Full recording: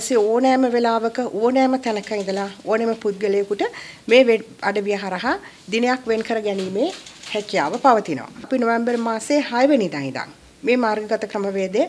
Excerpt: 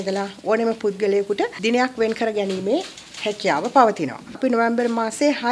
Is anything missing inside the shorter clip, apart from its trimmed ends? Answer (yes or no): yes